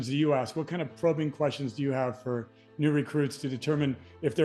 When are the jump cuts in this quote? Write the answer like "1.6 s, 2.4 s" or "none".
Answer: none